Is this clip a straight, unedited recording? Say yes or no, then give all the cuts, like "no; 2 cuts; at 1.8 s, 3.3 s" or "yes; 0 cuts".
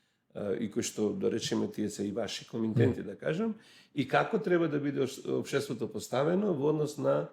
yes; 0 cuts